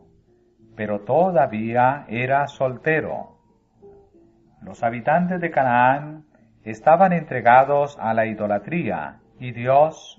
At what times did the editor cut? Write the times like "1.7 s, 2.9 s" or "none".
2.2 s